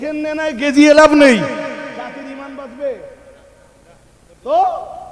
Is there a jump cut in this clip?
no; 0 cuts

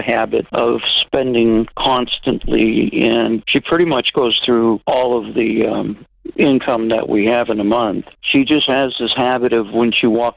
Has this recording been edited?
no; 0 cuts

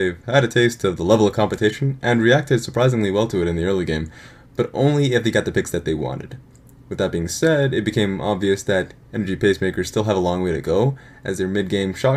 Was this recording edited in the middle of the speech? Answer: no; 0 cuts

